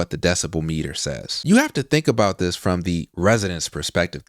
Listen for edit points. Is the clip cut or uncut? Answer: cut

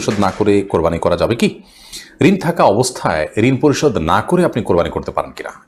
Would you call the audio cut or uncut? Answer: uncut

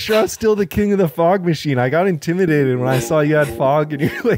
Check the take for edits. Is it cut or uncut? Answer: uncut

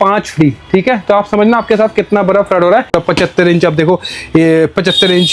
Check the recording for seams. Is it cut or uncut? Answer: cut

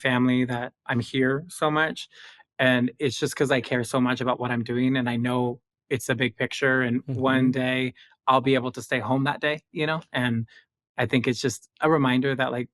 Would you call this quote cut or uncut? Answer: uncut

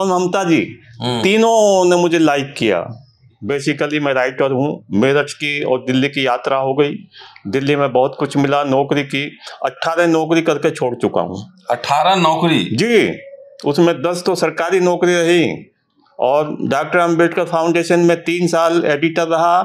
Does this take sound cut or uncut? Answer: cut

